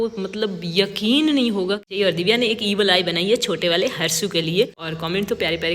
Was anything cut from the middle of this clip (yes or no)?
yes